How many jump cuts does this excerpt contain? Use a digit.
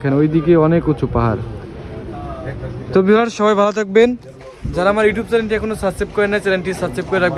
0